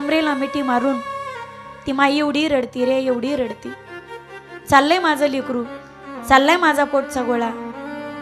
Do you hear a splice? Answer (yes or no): no